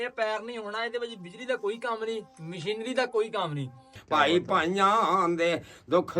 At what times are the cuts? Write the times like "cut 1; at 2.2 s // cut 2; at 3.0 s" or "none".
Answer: cut 1; at 4.0 s